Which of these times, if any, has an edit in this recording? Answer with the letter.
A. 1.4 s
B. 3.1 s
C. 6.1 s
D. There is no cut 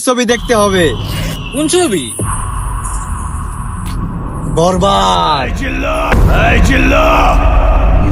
C